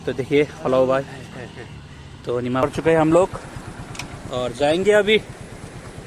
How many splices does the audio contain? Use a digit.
1